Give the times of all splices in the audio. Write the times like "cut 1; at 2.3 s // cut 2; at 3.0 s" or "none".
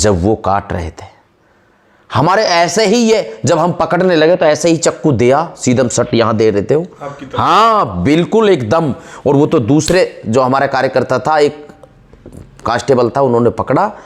none